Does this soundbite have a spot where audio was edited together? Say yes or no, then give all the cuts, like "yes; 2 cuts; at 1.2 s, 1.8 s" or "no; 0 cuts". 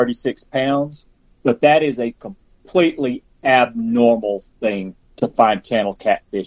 yes; 1 cut; at 4.9 s